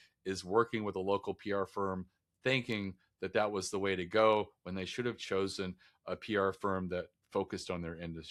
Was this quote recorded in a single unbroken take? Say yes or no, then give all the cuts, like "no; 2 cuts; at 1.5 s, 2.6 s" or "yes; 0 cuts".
yes; 0 cuts